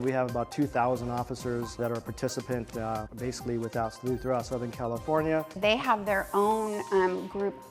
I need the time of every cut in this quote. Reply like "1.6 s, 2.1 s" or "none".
1.8 s, 3.1 s, 5.5 s